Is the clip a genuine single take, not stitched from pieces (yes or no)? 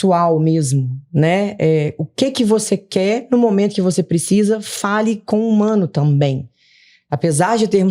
yes